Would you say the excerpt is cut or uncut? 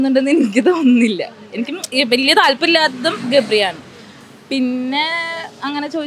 uncut